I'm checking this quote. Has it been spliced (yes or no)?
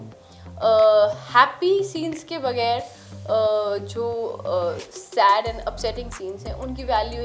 no